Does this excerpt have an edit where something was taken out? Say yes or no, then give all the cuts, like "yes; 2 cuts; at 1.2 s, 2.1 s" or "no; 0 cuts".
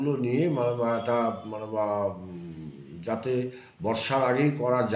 no; 0 cuts